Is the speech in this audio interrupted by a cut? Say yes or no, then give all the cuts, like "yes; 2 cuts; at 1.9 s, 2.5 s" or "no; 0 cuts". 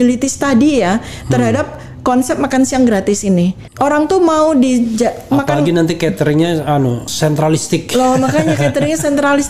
yes; 2 cuts; at 3.6 s, 7.1 s